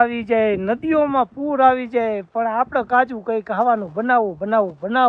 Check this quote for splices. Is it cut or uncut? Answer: uncut